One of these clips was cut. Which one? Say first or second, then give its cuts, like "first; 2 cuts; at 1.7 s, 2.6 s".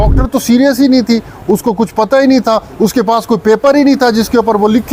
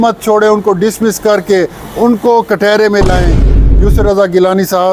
second; 1 cut; at 3.5 s